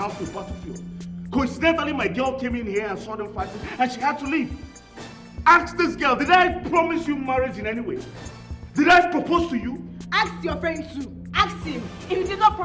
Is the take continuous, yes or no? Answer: yes